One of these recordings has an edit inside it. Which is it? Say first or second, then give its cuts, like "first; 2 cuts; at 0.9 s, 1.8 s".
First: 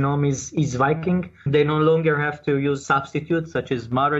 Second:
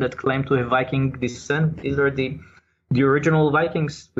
first; 2 cuts; at 1.5 s, 2.8 s